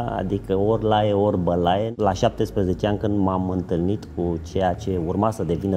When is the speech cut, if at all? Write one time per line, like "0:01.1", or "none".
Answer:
0:01.9